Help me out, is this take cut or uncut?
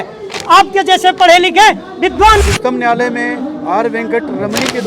cut